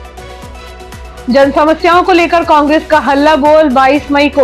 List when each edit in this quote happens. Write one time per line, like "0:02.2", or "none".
0:01.0